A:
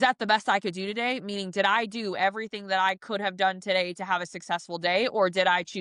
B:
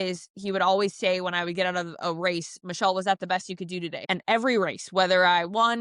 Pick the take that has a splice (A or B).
B